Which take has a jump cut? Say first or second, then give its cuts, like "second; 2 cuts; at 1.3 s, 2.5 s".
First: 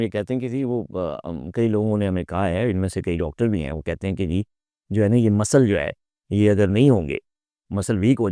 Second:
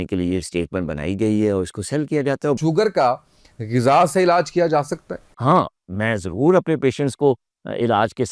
second; 2 cuts; at 2.6 s, 5.3 s